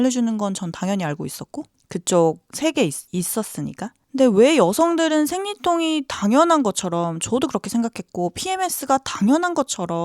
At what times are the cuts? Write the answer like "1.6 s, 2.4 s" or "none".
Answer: 3.0 s